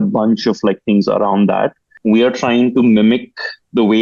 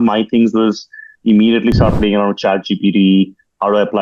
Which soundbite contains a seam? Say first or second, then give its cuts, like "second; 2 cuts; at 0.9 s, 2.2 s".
first; 1 cut; at 1.9 s